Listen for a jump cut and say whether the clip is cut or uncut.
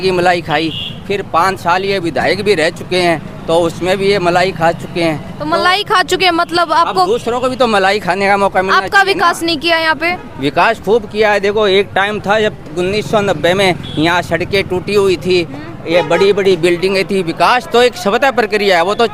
uncut